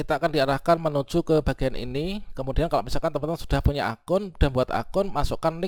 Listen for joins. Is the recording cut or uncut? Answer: uncut